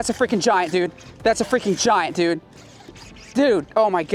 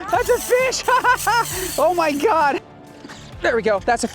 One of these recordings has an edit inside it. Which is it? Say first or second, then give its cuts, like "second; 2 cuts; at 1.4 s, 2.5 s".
second; 1 cut; at 2.7 s